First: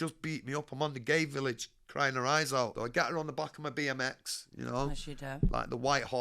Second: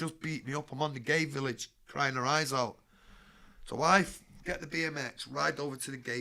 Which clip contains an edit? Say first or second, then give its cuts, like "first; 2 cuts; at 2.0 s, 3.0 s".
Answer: first; 1 cut; at 2.7 s